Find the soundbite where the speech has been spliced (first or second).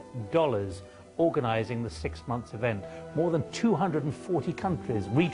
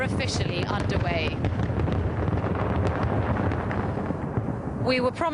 second